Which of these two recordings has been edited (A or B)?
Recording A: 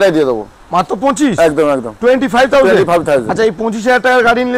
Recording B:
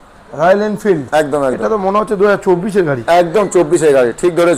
B